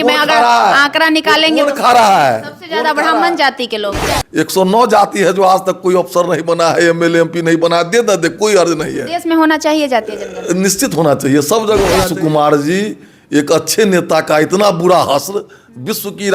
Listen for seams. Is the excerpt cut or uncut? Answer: cut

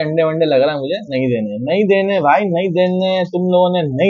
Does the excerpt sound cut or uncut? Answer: uncut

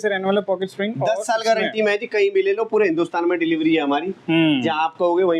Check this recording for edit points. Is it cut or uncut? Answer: uncut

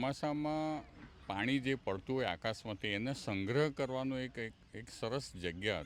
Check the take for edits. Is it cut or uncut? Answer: uncut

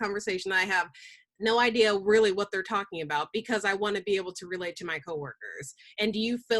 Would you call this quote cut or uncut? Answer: uncut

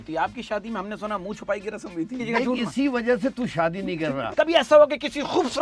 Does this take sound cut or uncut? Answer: cut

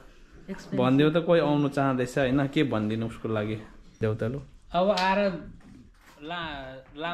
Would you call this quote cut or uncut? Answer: cut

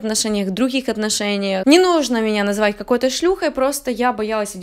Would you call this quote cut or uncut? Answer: uncut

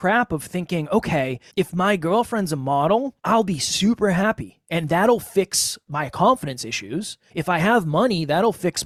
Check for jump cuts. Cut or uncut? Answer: uncut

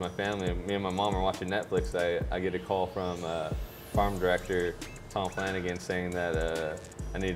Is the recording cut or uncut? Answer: uncut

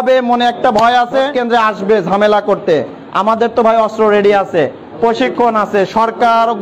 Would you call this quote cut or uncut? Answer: cut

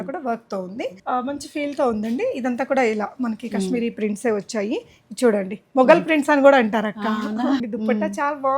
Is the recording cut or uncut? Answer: cut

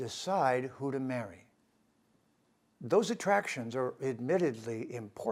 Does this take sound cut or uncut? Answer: uncut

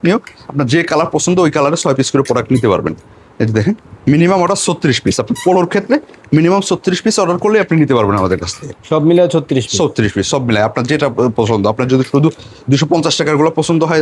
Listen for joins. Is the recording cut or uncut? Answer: uncut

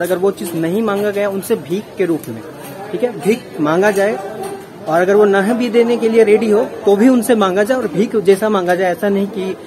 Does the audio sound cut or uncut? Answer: uncut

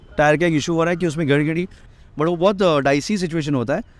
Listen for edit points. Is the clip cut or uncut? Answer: cut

